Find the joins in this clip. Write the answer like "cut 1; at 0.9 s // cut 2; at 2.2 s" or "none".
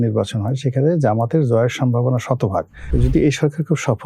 cut 1; at 2.8 s

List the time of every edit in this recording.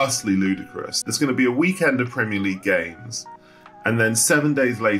cut 1; at 1.0 s

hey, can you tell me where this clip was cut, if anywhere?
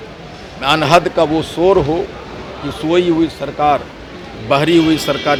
none

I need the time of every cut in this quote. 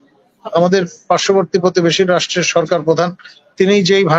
none

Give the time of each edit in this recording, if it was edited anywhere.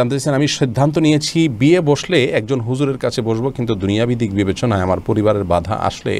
none

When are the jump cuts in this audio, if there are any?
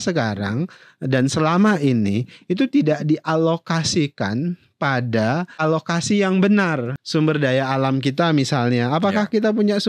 cut 1; at 5.6 s // cut 2; at 6.9 s

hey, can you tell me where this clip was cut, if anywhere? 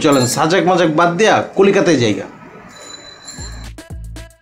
none

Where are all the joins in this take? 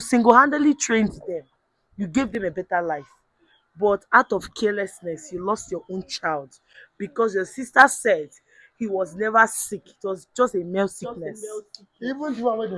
none

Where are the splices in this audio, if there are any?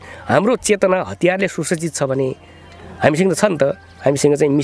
none

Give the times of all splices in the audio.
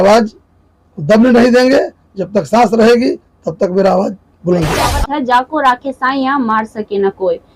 cut 1; at 5.0 s

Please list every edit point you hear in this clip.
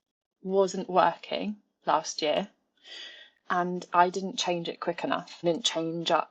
cut 1; at 5.3 s

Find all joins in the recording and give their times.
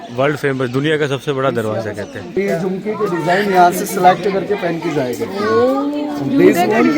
cut 1; at 2.3 s

